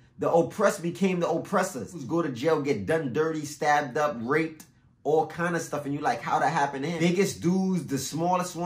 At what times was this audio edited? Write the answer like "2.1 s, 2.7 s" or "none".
2.0 s, 6.9 s